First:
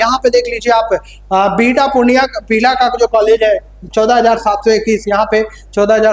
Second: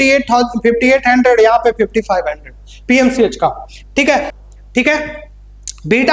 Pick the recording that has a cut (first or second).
second